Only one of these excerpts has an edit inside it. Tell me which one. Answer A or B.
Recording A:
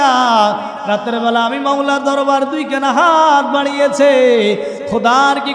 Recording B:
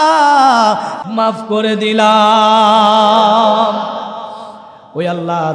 B